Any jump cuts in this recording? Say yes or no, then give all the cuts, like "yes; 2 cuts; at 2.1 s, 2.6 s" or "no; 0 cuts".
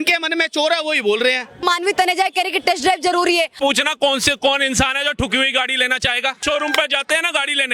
yes; 3 cuts; at 1.6 s, 3.5 s, 6.4 s